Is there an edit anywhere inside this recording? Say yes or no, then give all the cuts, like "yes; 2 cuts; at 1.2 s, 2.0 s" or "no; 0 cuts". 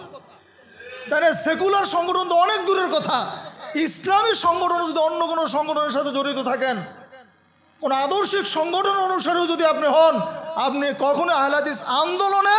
no; 0 cuts